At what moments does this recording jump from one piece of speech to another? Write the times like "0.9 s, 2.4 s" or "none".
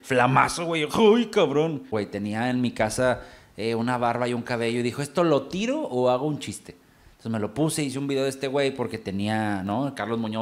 1.9 s